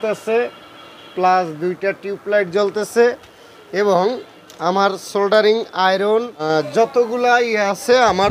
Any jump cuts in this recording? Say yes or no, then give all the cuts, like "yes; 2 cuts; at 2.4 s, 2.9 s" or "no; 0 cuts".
yes; 1 cut; at 6.3 s